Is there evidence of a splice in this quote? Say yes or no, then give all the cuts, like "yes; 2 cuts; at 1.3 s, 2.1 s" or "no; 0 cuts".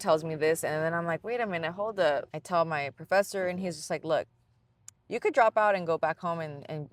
yes; 1 cut; at 2.3 s